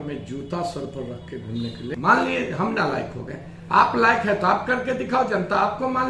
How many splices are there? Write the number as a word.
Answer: one